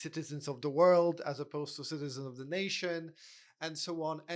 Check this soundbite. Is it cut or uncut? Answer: uncut